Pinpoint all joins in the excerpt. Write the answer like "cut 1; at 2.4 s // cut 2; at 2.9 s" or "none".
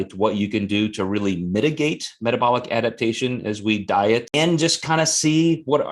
cut 1; at 4.3 s